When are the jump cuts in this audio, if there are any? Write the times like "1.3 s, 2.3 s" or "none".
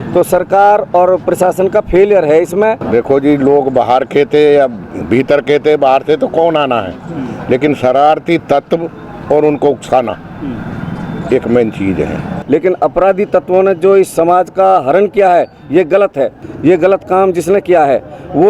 2.8 s, 12.3 s, 16.4 s